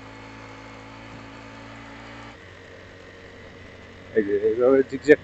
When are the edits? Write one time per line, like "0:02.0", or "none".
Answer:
0:02.3